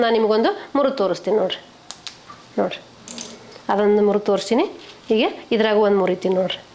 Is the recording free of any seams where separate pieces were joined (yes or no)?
yes